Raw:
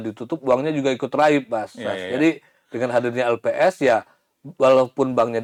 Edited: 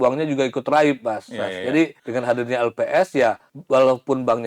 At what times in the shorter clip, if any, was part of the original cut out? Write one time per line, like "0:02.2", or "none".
0:02.0
0:03.5